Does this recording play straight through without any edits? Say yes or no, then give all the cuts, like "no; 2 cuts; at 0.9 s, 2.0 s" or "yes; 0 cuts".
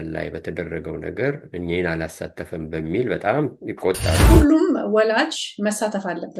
no; 1 cut; at 4.1 s